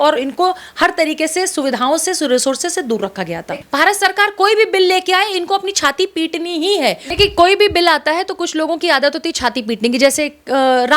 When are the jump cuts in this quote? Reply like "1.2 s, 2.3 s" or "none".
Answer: 3.6 s, 7.0 s